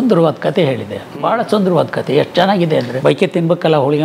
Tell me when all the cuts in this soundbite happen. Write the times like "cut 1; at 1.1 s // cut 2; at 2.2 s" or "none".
cut 1; at 2.9 s